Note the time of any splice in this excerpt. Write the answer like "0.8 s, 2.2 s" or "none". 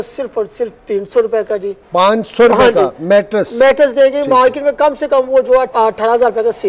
1.8 s, 5.7 s